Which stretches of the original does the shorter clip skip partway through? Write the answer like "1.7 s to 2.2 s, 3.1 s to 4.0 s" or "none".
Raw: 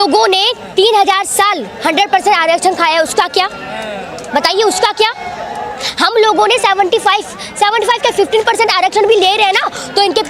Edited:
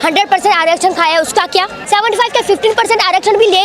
3.6 s to 7.5 s